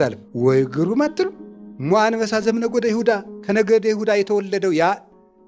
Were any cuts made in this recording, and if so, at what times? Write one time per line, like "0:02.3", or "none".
none